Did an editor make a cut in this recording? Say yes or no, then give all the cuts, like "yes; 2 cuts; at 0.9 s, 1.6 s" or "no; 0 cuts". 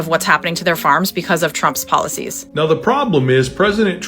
yes; 1 cut; at 2.4 s